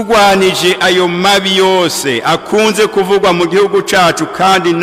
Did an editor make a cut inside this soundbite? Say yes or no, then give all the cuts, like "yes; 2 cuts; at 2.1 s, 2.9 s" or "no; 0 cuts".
no; 0 cuts